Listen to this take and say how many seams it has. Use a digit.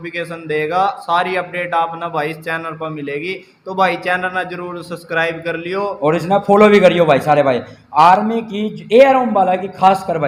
0